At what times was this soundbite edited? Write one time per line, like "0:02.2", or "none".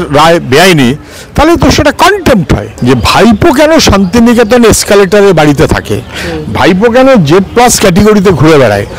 0:02.7